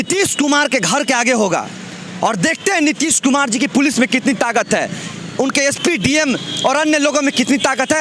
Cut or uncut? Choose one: uncut